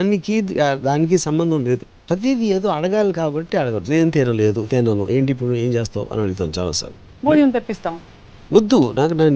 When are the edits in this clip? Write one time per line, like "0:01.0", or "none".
0:02.0